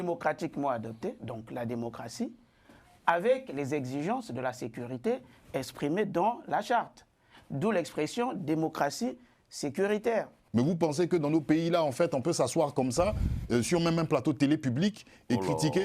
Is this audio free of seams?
no; 1 cut; at 10.4 s

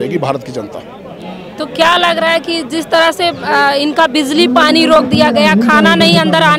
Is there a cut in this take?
no; 0 cuts

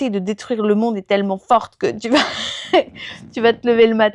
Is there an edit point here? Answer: no; 0 cuts

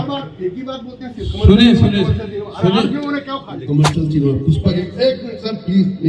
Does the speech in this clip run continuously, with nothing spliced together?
no; 1 cut; at 3.5 s

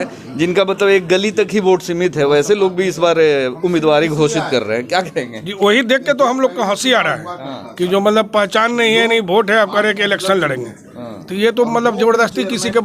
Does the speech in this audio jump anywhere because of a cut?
no; 0 cuts

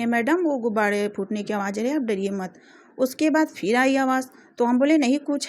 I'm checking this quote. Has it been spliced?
no; 0 cuts

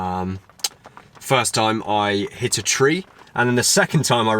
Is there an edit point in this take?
yes; 1 cut; at 3.2 s

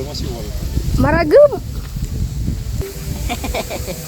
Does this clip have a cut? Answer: yes; 1 cut; at 2.8 s

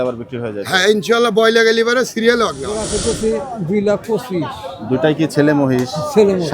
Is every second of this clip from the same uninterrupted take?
no; 1 cut; at 2.9 s

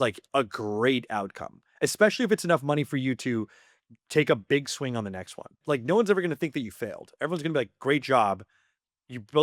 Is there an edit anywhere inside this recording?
yes; 1 cut; at 5.6 s

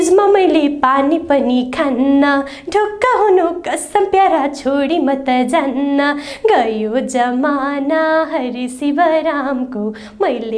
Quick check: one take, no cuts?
yes; 0 cuts

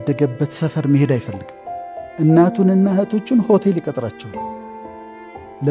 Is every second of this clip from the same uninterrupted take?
yes; 0 cuts

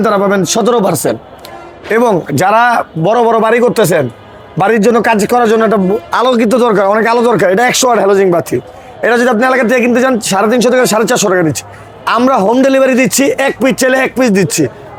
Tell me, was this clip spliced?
no; 0 cuts

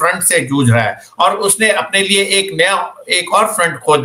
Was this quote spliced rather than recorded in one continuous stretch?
no; 0 cuts

